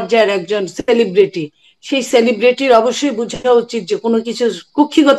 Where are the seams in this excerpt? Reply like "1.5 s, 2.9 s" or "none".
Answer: none